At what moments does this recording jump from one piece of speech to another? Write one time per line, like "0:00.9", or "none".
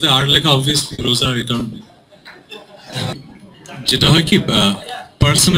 0:03.1